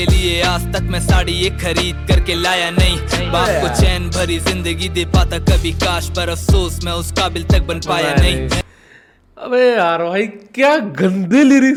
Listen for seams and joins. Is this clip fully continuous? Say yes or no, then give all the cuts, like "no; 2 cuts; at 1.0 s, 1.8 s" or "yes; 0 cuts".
yes; 0 cuts